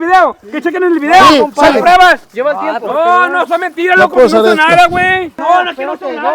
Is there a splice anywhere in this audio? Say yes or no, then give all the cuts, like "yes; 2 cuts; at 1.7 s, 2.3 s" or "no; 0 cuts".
yes; 2 cuts; at 2.3 s, 5.4 s